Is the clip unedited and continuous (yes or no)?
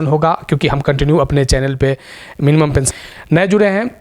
no